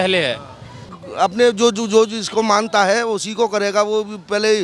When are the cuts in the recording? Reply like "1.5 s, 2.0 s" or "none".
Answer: 0.9 s